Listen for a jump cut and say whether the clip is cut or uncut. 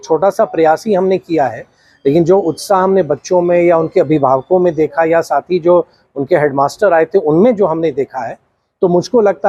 uncut